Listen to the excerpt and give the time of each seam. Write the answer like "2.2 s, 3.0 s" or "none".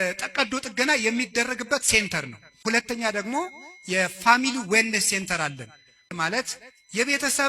2.6 s, 6.1 s